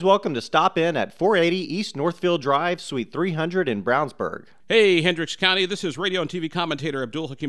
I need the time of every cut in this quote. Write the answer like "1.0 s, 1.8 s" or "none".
4.5 s